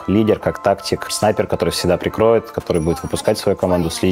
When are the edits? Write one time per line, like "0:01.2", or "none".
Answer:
0:01.1